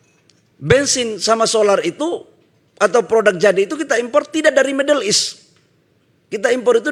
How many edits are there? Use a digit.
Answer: 0